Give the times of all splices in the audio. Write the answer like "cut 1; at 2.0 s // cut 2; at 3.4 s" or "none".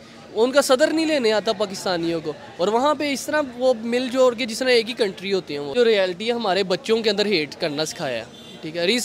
cut 1; at 5.7 s